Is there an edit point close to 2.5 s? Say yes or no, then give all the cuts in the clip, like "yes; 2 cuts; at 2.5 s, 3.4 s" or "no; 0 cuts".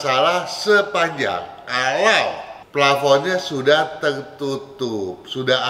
yes; 1 cut; at 2.5 s